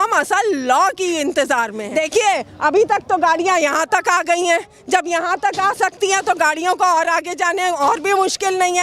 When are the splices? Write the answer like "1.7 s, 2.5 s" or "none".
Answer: 1.8 s